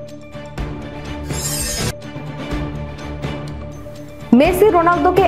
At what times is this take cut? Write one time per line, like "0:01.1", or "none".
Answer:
0:01.3